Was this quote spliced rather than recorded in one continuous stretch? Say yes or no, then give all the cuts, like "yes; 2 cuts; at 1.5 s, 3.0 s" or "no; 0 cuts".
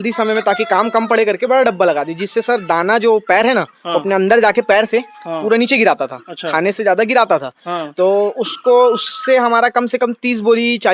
no; 0 cuts